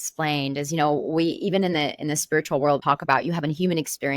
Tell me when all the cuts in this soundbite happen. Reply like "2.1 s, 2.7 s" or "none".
2.8 s